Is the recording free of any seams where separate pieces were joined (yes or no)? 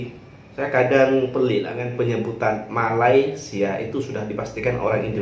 no